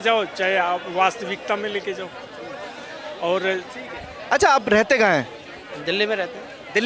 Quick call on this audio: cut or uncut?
uncut